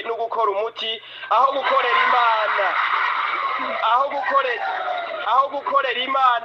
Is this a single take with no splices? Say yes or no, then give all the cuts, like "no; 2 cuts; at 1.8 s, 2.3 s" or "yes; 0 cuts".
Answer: yes; 0 cuts